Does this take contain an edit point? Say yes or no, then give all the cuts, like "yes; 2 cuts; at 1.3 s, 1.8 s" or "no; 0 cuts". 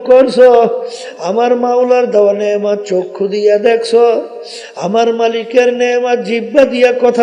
no; 0 cuts